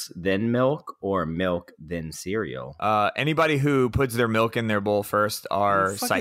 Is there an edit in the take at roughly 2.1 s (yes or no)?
yes